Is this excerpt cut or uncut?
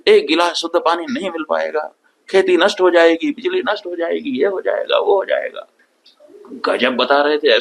uncut